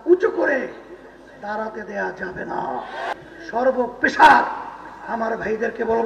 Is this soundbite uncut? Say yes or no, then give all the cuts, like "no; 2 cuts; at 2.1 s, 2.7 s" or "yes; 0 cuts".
no; 1 cut; at 3.1 s